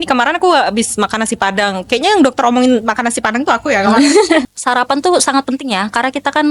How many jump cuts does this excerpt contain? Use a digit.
1